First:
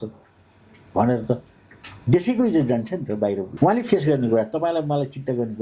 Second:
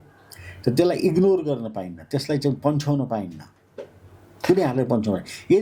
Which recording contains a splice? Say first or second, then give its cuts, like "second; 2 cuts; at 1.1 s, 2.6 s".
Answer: first; 1 cut; at 3.5 s